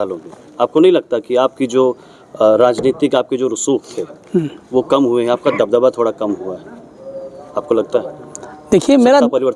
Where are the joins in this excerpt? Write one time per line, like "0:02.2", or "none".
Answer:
none

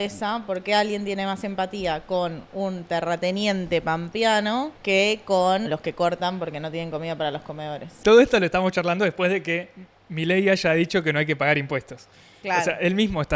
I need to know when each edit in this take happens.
0:04.8
0:05.7
0:08.0

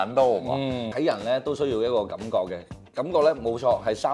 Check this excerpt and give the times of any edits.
0:00.9

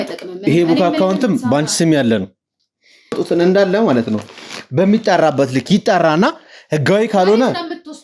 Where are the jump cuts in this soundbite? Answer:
0:03.2

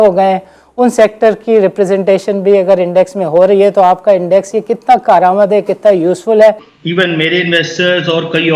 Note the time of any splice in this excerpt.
0:06.7

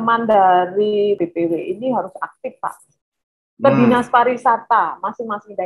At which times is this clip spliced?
0:01.2

